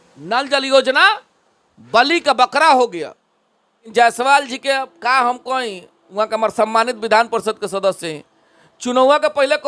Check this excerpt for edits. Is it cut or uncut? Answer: cut